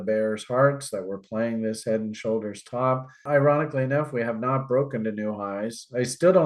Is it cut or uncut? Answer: cut